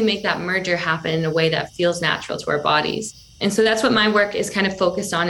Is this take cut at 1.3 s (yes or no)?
no